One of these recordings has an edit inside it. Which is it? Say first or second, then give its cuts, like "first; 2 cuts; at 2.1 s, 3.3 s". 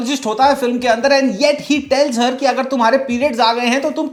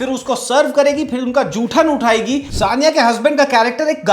second; 1 cut; at 2.5 s